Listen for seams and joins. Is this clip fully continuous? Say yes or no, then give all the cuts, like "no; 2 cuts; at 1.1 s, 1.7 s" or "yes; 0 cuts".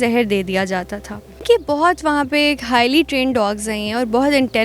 no; 1 cut; at 1.3 s